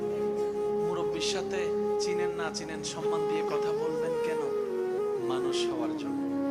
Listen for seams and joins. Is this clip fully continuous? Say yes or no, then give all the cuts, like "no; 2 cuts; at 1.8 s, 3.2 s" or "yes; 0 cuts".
yes; 0 cuts